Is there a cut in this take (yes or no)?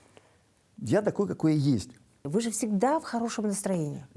yes